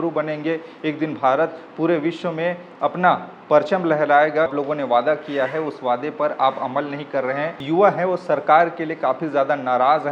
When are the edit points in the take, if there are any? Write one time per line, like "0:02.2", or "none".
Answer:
0:04.5
0:07.6

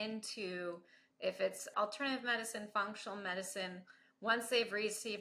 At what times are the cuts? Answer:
0:01.7

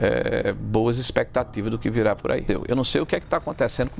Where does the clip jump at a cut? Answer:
0:02.5

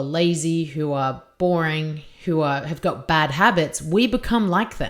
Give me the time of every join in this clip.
none

